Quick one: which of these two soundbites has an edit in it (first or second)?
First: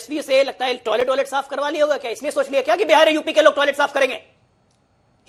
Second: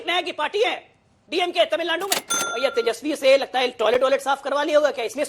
second